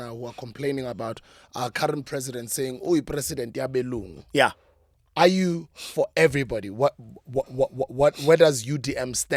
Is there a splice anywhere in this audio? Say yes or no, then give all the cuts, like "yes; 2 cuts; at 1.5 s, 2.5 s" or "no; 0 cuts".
no; 0 cuts